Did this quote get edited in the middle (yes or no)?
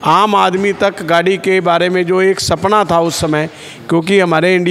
no